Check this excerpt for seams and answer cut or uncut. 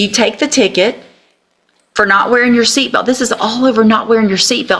uncut